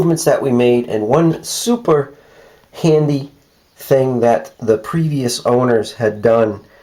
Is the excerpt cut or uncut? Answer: uncut